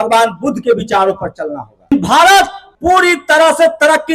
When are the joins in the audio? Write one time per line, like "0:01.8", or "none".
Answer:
0:01.9
0:02.6